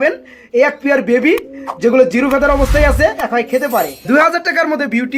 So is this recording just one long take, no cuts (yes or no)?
no